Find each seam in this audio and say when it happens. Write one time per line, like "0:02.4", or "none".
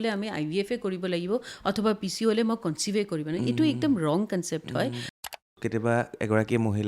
0:05.3